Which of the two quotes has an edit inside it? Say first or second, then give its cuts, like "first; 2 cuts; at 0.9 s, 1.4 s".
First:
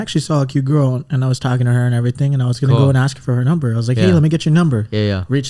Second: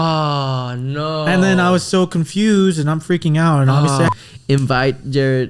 second; 1 cut; at 4.1 s